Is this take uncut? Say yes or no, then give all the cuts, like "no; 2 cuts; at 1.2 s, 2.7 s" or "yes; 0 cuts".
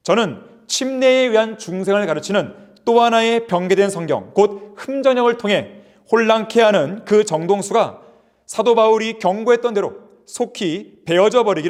yes; 0 cuts